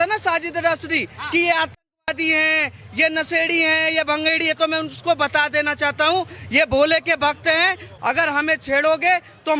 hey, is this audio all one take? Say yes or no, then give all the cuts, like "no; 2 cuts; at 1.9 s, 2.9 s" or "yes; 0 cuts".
no; 1 cut; at 7.9 s